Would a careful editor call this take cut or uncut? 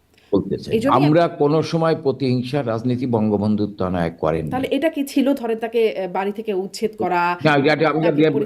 cut